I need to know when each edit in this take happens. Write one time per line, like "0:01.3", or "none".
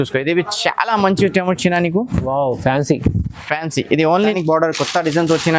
0:04.3